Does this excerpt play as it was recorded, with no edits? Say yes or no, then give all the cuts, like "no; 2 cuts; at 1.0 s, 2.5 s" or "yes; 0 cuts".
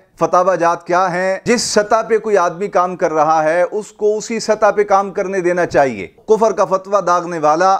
no; 2 cuts; at 1.4 s, 6.2 s